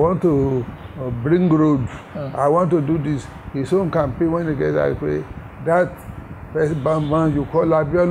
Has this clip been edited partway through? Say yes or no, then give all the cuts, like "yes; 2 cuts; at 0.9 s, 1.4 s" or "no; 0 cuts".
no; 0 cuts